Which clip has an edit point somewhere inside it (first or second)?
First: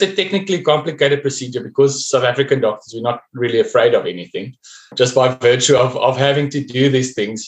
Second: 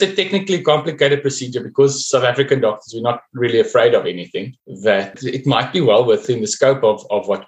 second